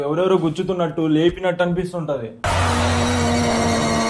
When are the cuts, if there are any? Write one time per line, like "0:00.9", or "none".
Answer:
none

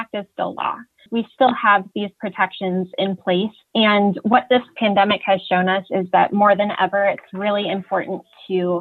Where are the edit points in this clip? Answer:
0:01.1

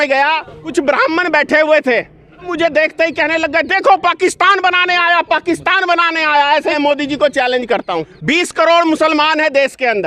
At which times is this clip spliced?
0:00.7
0:02.5
0:06.7
0:08.1

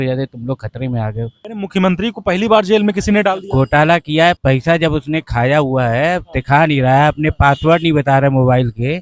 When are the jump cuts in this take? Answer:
0:01.4
0:04.4

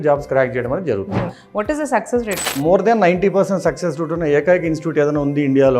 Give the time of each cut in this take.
0:01.4
0:02.6

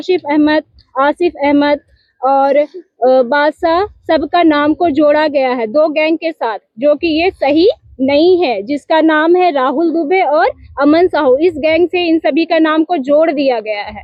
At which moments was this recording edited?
none

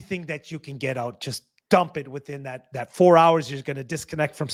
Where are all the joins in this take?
none

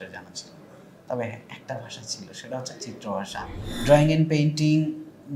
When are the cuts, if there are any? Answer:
0:03.7

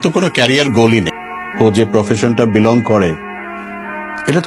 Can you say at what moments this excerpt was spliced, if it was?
0:01.2

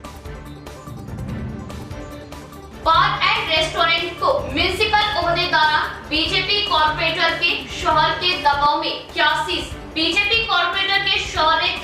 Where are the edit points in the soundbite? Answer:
0:01.4

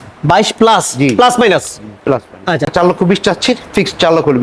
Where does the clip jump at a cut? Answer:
0:02.7

